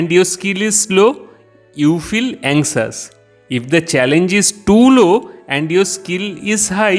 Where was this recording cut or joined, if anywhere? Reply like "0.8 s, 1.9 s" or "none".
none